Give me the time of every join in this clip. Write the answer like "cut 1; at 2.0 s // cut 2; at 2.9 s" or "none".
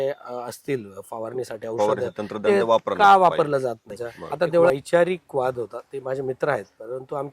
cut 1; at 4.7 s